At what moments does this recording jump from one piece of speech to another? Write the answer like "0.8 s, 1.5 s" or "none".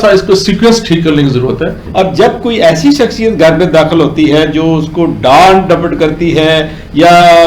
1.8 s